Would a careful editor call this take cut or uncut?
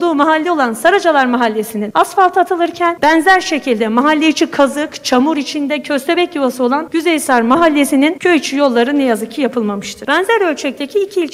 cut